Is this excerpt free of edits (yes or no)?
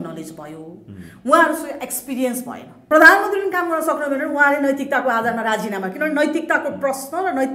no